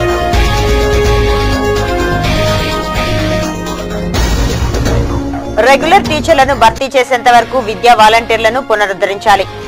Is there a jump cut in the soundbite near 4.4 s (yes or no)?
yes